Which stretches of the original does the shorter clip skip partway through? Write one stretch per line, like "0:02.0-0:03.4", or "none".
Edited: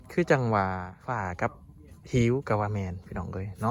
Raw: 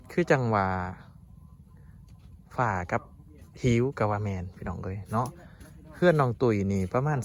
0:00.9-0:02.4